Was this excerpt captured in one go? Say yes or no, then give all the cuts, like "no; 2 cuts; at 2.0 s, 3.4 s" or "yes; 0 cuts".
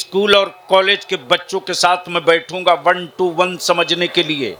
yes; 0 cuts